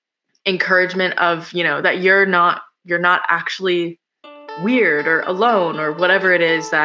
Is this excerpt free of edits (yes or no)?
yes